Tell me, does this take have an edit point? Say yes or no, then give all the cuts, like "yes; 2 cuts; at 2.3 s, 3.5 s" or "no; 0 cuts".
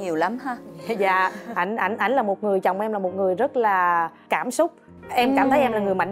no; 0 cuts